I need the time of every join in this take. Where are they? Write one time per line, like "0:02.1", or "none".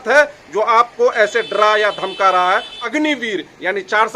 0:02.8